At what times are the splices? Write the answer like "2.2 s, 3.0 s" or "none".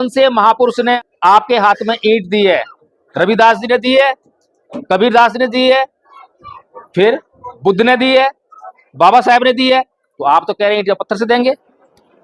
1.0 s